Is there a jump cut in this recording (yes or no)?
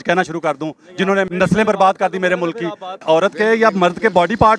yes